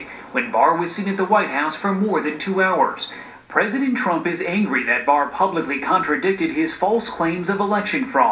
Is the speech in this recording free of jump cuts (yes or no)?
no